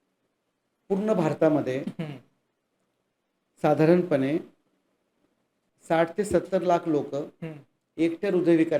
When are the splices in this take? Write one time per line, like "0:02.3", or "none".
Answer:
0:05.5

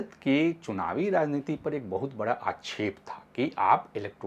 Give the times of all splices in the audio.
none

